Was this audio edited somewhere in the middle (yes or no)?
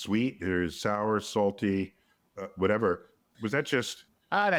no